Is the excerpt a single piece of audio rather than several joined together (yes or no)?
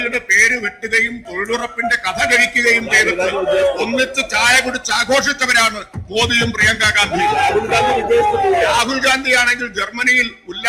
yes